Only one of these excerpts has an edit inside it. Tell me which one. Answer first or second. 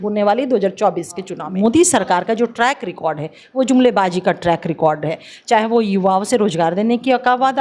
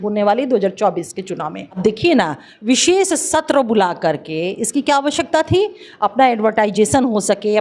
first